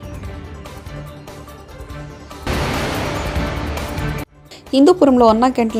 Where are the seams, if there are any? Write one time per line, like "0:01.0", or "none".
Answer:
none